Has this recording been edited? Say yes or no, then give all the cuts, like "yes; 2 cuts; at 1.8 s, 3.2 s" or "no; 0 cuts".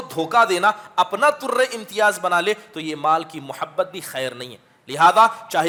no; 0 cuts